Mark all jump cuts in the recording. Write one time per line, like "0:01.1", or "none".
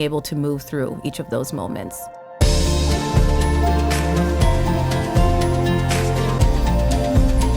0:01.9